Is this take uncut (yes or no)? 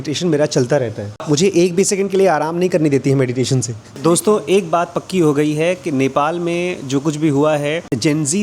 no